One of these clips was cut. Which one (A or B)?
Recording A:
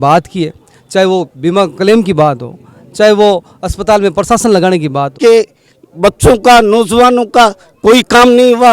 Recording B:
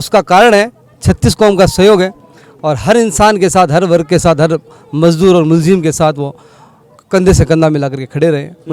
A